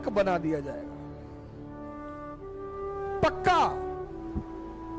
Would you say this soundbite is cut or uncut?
uncut